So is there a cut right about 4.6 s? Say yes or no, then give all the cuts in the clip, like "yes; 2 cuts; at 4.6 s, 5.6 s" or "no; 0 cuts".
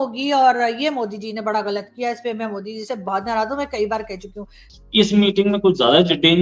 yes; 1 cut; at 4.6 s